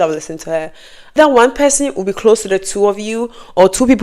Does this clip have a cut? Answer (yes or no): yes